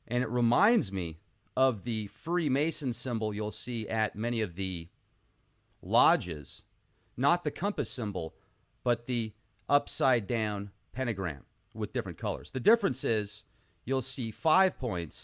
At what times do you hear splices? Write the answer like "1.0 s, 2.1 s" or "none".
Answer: 5.4 s